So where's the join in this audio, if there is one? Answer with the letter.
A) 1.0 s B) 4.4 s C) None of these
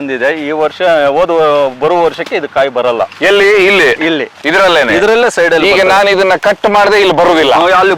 B